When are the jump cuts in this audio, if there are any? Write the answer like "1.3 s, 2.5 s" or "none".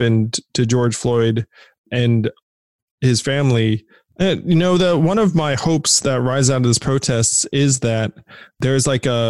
4.0 s